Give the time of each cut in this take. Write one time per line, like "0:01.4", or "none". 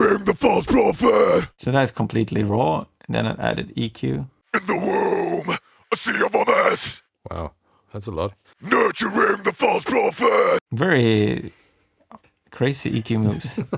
0:04.4
0:08.5